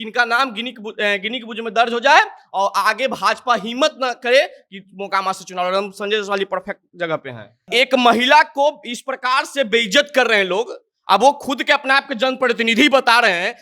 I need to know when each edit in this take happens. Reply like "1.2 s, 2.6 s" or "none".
7.6 s